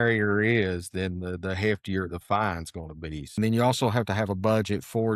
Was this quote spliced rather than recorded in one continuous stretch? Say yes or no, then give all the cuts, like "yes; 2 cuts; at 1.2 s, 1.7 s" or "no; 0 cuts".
yes; 1 cut; at 3.4 s